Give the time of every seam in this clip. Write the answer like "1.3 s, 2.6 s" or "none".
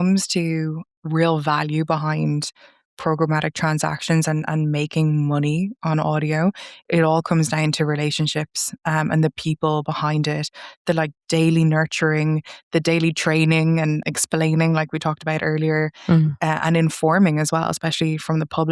0.9 s